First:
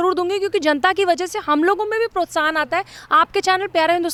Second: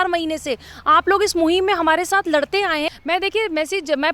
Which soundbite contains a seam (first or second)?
second